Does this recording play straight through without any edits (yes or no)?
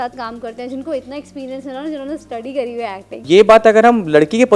no